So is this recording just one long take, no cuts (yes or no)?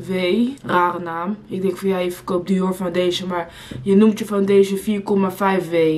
yes